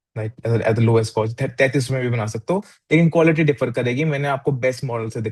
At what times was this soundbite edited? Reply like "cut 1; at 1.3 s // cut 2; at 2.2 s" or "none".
none